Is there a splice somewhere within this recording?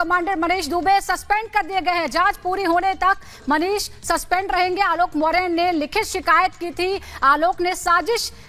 no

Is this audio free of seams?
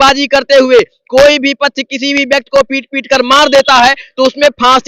yes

